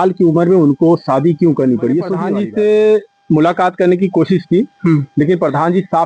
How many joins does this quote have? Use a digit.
1